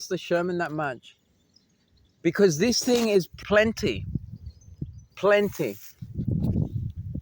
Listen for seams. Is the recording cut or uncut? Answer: cut